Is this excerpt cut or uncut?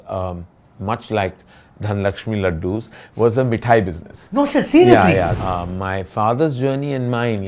cut